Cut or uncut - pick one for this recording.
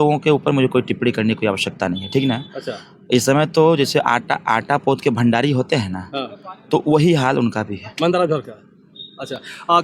uncut